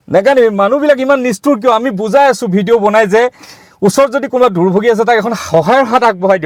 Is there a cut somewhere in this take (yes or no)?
no